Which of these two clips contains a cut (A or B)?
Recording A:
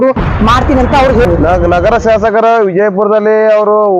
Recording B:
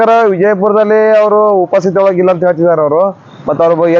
A